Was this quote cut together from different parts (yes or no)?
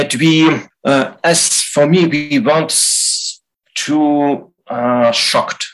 no